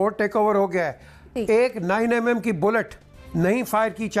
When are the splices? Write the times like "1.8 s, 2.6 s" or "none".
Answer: none